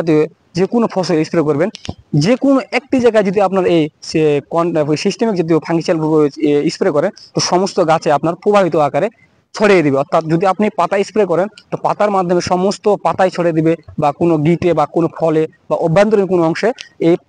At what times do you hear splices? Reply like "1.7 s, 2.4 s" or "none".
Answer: none